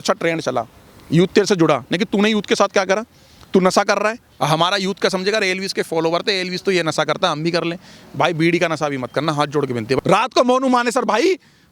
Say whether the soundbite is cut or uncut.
cut